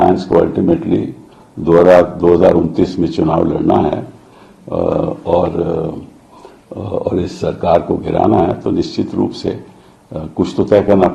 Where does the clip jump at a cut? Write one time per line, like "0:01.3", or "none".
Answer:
none